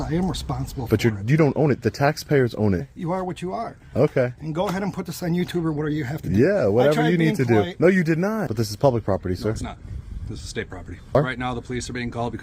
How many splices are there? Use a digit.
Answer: 3